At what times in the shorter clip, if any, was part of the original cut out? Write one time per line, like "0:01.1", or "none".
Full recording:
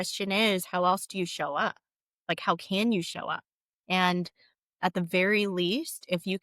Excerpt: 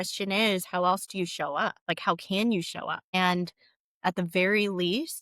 0:01.8
0:03.0